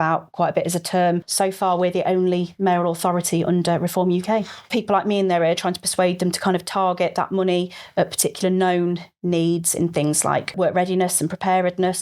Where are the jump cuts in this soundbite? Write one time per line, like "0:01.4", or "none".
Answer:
0:01.3
0:04.7
0:10.5